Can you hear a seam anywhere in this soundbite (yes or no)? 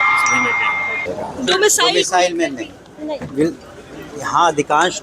yes